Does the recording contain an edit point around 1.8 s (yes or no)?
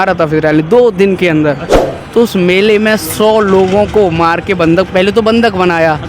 yes